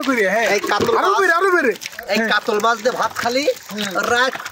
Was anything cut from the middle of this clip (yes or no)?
yes